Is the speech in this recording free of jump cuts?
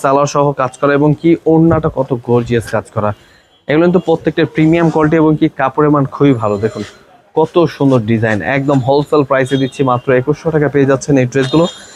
yes; 0 cuts

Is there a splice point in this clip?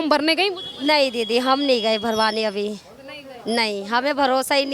no; 0 cuts

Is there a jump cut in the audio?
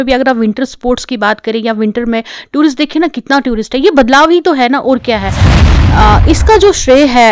yes; 1 cut; at 5.6 s

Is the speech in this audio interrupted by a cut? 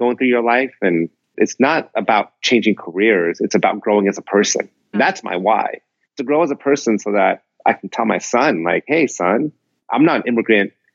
yes; 2 cuts; at 1.4 s, 4.9 s

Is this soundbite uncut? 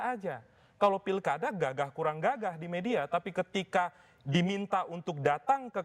yes; 0 cuts

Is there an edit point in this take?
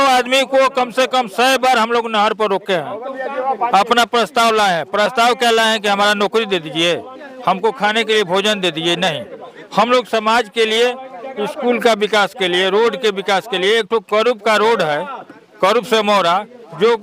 no; 0 cuts

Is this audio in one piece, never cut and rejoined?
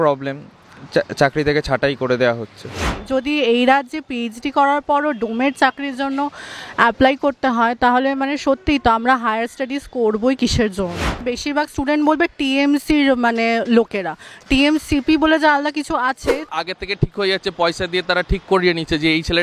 no; 3 cuts; at 2.9 s, 11.3 s, 16.5 s

